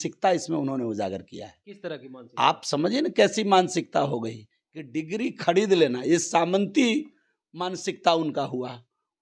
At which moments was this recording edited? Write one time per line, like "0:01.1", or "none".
none